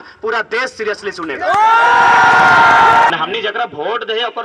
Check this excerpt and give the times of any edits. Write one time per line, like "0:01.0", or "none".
0:03.1